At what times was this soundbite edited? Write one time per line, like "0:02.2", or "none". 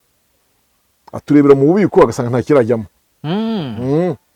none